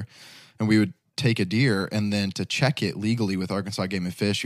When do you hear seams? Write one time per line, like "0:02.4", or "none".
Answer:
none